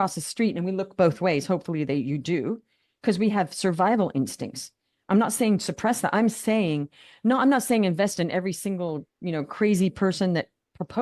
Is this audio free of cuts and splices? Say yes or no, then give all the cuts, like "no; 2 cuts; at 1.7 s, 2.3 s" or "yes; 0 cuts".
yes; 0 cuts